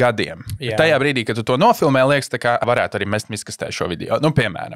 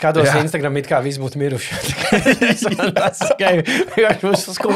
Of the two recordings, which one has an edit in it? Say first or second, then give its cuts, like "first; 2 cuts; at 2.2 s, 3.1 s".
first; 1 cut; at 2.6 s